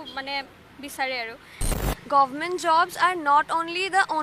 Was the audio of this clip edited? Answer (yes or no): yes